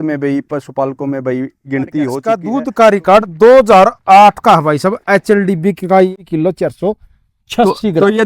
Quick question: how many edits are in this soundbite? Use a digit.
2